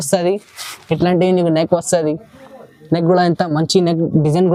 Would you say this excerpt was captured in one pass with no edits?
yes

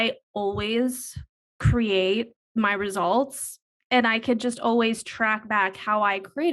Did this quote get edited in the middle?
yes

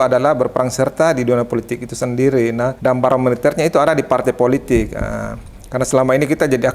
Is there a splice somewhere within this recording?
yes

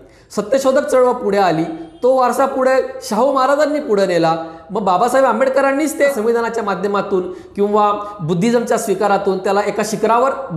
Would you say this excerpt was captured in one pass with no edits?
no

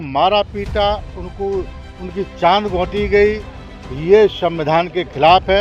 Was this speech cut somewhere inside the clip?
no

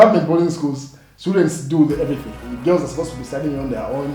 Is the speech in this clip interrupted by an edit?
yes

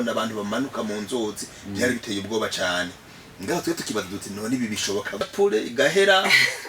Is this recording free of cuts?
no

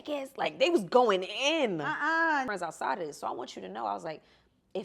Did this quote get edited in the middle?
yes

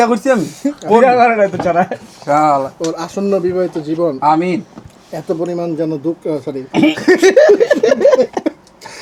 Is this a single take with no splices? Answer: yes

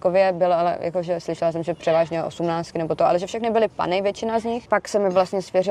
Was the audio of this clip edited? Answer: yes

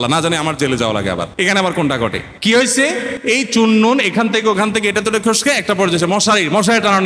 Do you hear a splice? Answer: yes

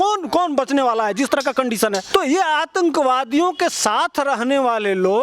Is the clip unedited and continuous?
no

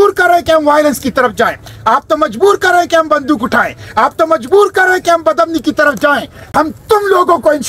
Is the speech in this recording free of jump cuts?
no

